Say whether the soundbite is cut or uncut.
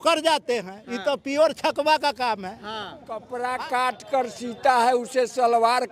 cut